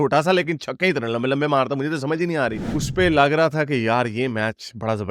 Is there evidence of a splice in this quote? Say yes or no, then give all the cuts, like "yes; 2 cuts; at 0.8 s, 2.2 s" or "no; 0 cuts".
yes; 1 cut; at 2.7 s